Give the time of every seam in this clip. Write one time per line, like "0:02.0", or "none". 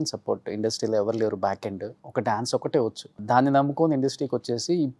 0:02.0
0:03.2